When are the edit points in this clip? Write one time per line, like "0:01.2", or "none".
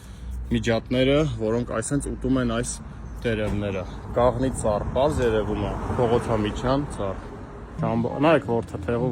0:07.8